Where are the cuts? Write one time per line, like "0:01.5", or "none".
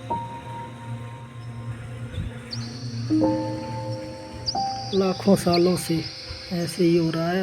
0:04.8